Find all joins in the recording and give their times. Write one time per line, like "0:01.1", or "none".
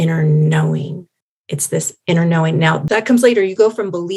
0:02.8